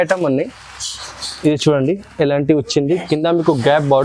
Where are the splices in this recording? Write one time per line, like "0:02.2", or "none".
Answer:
none